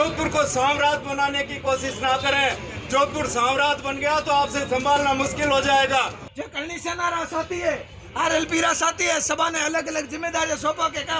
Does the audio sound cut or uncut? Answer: cut